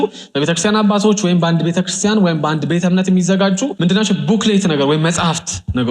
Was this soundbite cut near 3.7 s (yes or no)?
yes